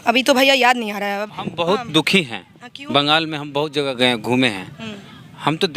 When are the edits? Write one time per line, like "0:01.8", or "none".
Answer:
0:01.3